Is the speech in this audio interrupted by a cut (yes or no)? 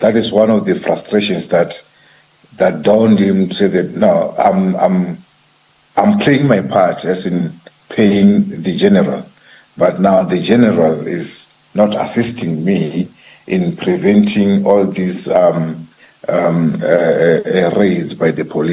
no